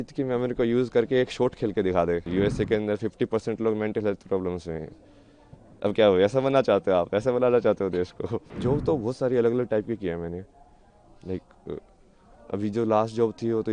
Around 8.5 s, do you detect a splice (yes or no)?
yes